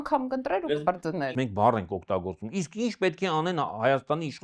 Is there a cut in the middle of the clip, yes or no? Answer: yes